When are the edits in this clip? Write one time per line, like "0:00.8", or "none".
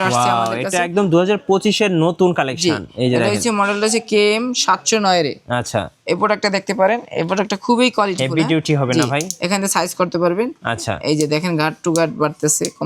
none